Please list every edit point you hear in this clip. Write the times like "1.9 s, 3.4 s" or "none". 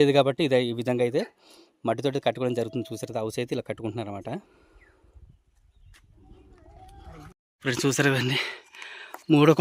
7.5 s